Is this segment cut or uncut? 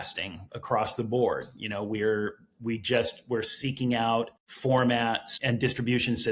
cut